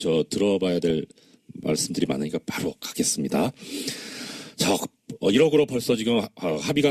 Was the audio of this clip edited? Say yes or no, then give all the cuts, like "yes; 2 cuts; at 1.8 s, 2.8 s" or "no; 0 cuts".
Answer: yes; 1 cut; at 3.6 s